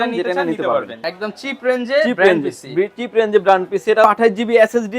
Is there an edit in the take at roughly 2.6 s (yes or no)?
no